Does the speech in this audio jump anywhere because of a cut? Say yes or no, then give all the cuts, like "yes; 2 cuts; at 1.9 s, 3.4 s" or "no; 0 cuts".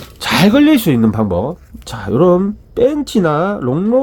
no; 0 cuts